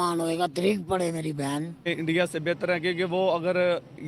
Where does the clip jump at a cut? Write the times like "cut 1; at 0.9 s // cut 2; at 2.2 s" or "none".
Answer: cut 1; at 1.9 s